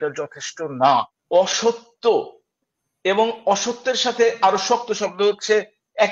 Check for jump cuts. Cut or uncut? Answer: cut